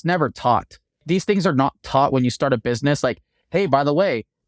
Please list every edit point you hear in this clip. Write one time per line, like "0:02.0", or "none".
0:01.0